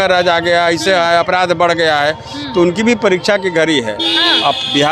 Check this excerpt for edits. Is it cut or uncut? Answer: uncut